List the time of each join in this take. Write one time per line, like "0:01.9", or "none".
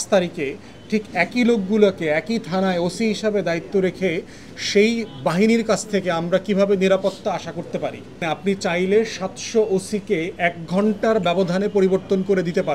0:08.2